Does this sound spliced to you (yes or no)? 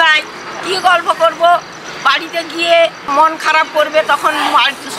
yes